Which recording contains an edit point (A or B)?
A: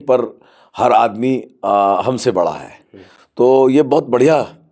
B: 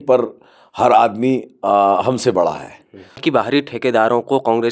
B